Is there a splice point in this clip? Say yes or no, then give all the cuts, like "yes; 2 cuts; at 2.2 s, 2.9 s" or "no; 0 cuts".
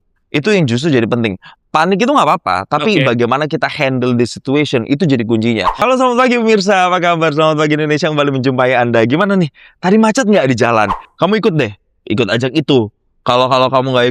yes; 2 cuts; at 5.8 s, 11.0 s